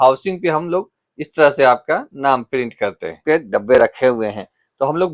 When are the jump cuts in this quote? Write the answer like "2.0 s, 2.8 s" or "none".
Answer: 3.2 s